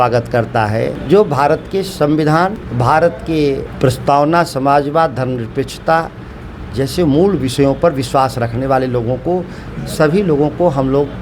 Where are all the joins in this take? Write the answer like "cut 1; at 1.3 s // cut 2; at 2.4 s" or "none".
cut 1; at 1.0 s // cut 2; at 2.6 s // cut 3; at 3.7 s